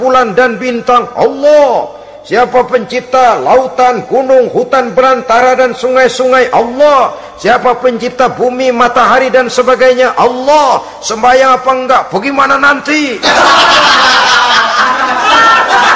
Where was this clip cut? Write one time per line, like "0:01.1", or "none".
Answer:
none